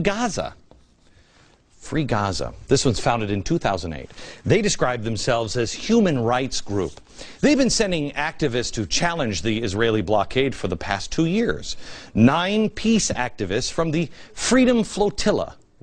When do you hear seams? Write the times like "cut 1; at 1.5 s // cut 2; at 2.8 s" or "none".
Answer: cut 1; at 8.1 s